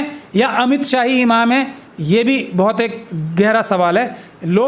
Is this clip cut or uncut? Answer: uncut